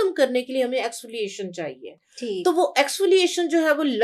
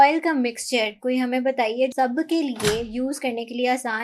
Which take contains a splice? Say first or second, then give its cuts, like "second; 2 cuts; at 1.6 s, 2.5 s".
second; 1 cut; at 1.9 s